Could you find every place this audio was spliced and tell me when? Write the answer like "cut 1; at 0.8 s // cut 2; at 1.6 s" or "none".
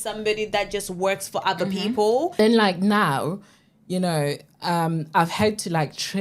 cut 1; at 2.4 s